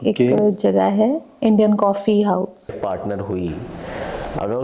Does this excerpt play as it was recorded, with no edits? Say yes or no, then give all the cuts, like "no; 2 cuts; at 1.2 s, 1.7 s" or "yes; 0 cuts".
no; 1 cut; at 2.7 s